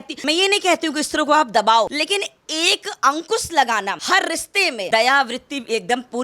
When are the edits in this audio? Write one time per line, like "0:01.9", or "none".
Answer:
0:04.9